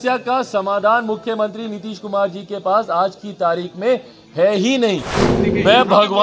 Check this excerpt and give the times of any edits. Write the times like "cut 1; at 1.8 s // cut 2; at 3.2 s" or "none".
cut 1; at 5.2 s